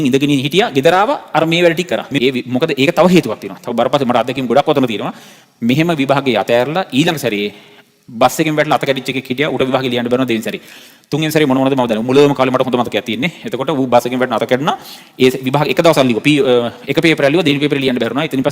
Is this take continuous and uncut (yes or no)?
no